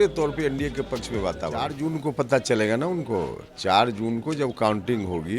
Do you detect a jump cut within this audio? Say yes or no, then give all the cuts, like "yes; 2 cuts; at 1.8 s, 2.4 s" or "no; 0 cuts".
yes; 1 cut; at 1.8 s